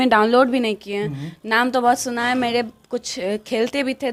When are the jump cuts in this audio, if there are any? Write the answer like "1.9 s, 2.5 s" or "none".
none

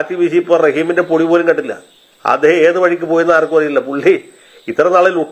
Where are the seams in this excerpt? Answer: 2.1 s

